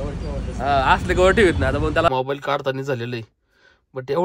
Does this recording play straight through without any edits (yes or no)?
no